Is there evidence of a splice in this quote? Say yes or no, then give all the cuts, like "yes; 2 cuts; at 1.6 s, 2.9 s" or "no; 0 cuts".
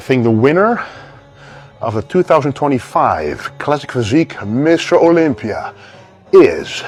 no; 0 cuts